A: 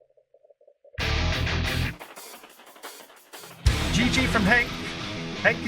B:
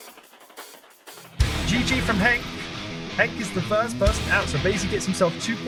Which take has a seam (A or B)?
A